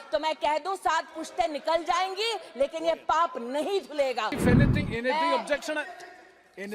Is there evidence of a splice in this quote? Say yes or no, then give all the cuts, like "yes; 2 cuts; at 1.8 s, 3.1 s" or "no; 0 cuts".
yes; 1 cut; at 4.4 s